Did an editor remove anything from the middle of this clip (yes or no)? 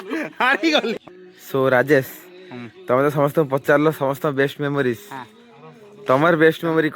yes